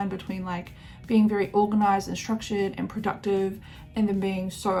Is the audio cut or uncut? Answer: uncut